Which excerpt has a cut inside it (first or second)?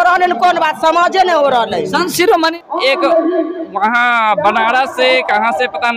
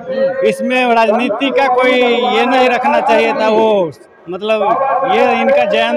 first